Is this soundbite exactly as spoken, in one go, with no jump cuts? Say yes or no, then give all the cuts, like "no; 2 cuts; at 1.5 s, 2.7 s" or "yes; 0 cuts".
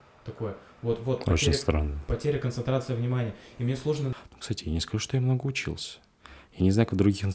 no; 1 cut; at 4.1 s